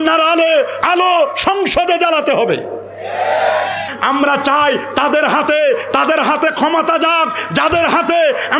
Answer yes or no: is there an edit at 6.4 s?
no